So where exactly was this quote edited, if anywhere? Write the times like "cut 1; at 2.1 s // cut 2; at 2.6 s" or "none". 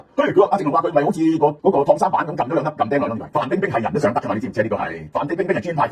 cut 1; at 1.6 s // cut 2; at 3.2 s // cut 3; at 5.0 s